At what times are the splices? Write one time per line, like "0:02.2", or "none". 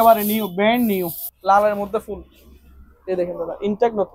0:01.2